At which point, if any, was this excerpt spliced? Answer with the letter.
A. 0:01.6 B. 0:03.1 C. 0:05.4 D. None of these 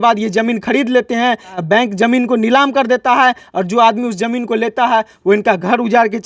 A